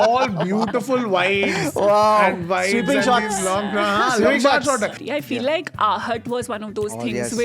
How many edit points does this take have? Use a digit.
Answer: 1